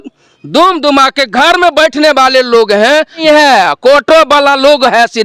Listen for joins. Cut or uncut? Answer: cut